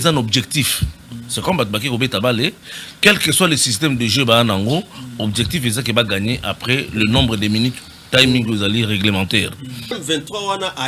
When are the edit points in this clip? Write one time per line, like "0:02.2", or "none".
0:10.0

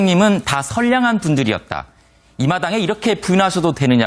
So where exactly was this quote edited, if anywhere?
0:01.7

